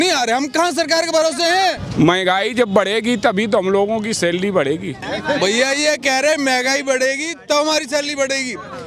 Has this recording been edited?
yes; 2 cuts; at 1.8 s, 5.1 s

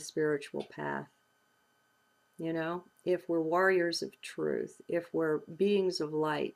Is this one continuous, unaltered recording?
yes; 0 cuts

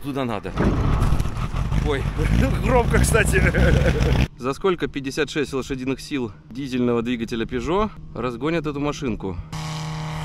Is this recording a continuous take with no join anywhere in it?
no; 4 cuts; at 4.3 s, 6.4 s, 8.0 s, 9.5 s

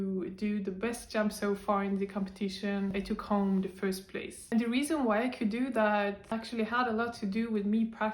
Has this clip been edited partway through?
yes; 2 cuts; at 2.9 s, 6.3 s

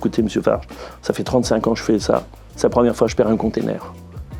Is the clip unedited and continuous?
yes; 0 cuts

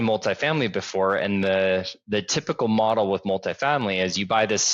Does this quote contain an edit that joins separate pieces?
no; 0 cuts

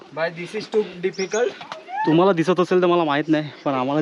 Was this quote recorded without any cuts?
no; 1 cut; at 2.0 s

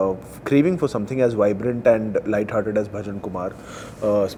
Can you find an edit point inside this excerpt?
no; 0 cuts

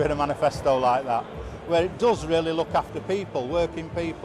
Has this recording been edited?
no; 0 cuts

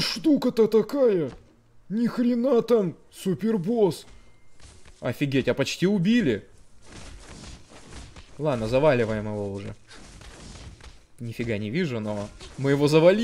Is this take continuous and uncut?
yes; 0 cuts

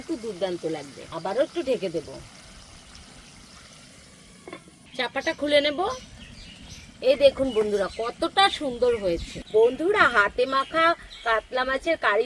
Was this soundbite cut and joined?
yes; 3 cuts; at 1.0 s, 4.9 s, 9.3 s

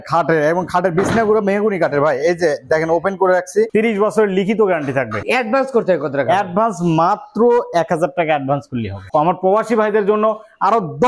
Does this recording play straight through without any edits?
no; 3 cuts; at 3.7 s, 5.2 s, 9.0 s

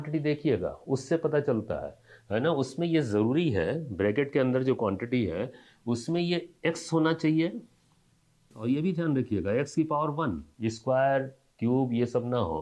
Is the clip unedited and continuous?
no; 1 cut; at 8.5 s

